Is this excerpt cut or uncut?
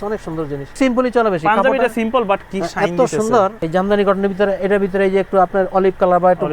cut